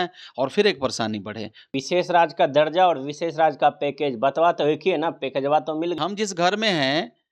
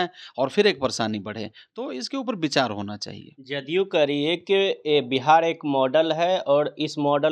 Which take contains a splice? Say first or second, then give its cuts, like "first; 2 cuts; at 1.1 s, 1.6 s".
first; 2 cuts; at 1.7 s, 6.0 s